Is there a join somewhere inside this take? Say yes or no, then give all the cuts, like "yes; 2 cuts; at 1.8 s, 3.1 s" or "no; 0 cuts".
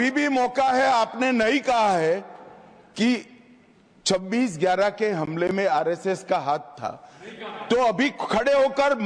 no; 0 cuts